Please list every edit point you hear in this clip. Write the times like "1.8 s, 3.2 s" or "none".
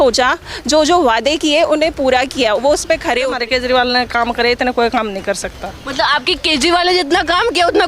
3.3 s